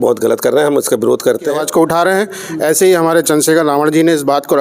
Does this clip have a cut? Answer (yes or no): yes